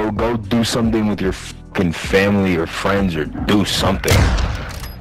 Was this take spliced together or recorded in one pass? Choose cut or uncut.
uncut